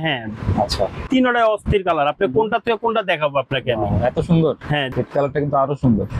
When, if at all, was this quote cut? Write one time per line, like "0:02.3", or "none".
0:01.0
0:04.9